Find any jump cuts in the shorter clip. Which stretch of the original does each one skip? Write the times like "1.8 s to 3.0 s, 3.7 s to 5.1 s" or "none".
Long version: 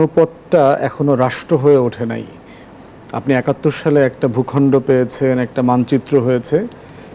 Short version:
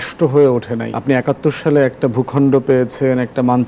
2.2 s to 3.1 s